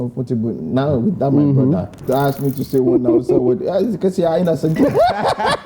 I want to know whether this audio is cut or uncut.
cut